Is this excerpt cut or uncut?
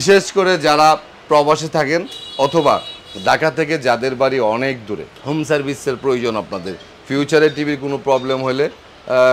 uncut